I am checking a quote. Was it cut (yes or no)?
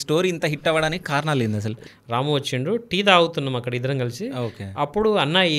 yes